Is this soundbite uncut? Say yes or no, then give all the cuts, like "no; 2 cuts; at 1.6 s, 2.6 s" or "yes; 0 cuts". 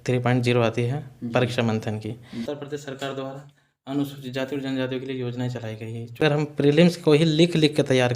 no; 2 cuts; at 2.3 s, 6.2 s